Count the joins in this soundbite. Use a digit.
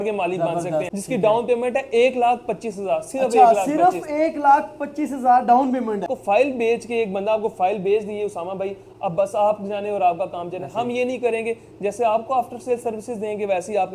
2